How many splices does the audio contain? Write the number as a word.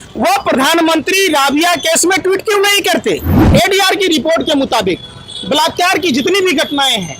one